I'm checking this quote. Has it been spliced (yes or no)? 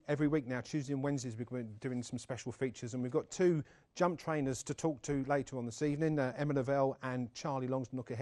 yes